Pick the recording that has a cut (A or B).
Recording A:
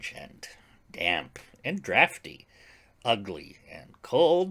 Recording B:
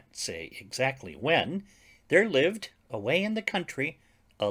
A